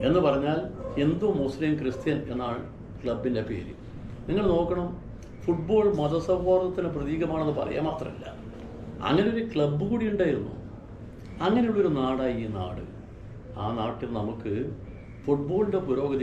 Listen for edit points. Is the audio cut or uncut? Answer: uncut